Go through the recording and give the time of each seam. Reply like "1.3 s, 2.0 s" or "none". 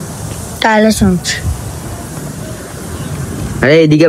none